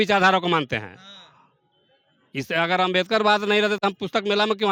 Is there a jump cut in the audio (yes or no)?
no